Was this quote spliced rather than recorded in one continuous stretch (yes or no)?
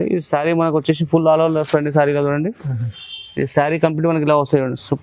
no